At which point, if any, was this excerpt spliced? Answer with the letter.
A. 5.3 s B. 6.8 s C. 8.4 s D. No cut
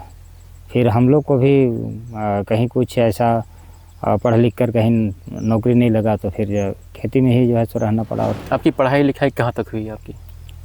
C